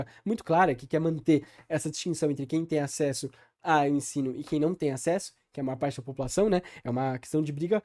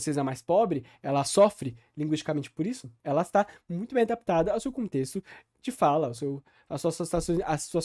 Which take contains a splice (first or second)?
second